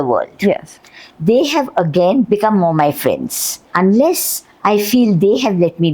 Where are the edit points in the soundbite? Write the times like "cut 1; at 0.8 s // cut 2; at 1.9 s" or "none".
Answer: cut 1; at 2.2 s // cut 2; at 3.7 s